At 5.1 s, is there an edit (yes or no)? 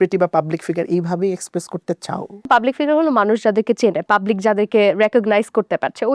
no